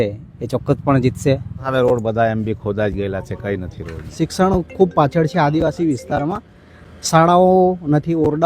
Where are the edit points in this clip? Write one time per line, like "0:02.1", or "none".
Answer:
0:01.6
0:04.0